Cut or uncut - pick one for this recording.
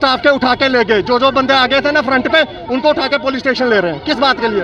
uncut